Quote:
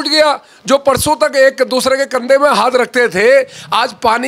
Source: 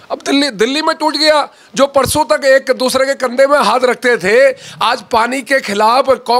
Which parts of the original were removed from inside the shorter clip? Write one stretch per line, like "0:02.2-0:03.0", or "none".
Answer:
none